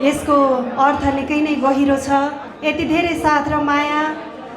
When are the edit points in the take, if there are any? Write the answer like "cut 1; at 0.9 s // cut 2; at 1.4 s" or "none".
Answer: cut 1; at 2.5 s